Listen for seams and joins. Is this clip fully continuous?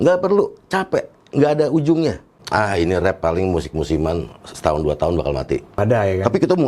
no; 2 cuts; at 2.4 s, 5.7 s

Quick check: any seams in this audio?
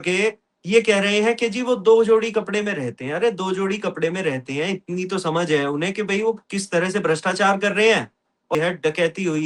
yes; 1 cut; at 8.5 s

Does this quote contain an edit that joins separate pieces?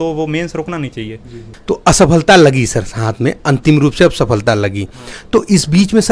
yes; 1 cut; at 1.4 s

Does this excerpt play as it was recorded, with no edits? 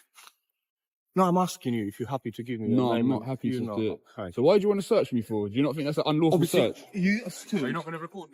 yes; 0 cuts

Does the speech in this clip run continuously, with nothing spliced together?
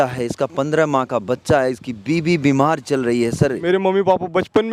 no; 1 cut; at 3.6 s

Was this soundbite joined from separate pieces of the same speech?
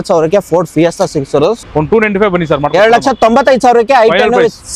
yes; 1 cut; at 1.6 s

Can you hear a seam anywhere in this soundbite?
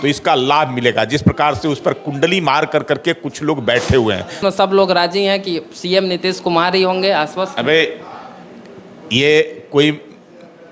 yes; 1 cut; at 4.4 s

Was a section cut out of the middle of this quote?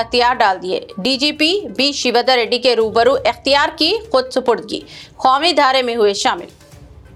no; 0 cuts

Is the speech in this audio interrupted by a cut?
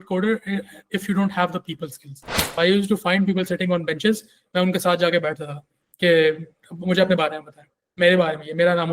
yes; 1 cut; at 2.6 s

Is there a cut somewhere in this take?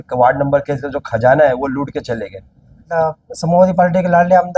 yes; 1 cut; at 2.8 s

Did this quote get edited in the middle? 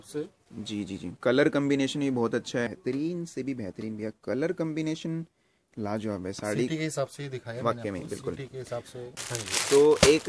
yes; 2 cuts; at 2.7 s, 9.2 s

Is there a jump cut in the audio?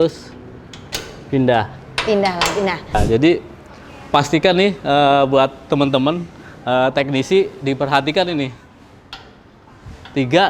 yes; 1 cut; at 3.0 s

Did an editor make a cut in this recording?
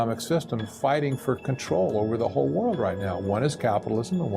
no; 0 cuts

